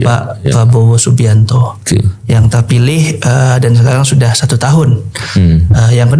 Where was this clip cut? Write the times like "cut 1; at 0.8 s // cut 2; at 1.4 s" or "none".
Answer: none